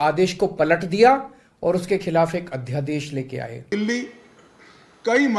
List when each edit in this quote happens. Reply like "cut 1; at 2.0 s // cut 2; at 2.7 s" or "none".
cut 1; at 3.6 s